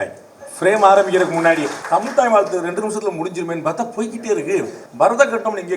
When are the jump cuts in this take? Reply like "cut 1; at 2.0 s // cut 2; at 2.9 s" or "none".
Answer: cut 1; at 1.8 s // cut 2; at 4.8 s